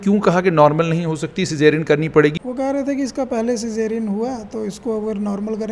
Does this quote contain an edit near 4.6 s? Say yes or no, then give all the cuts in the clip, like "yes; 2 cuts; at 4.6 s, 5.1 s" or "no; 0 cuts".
no; 1 cut; at 2.4 s